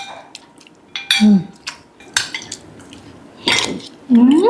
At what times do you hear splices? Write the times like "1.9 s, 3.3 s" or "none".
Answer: 2.0 s